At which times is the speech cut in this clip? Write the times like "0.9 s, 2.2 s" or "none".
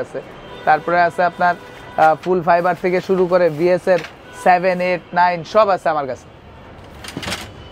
none